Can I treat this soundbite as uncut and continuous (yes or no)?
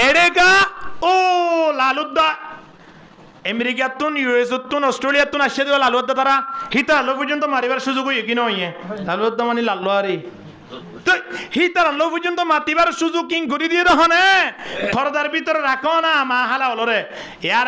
yes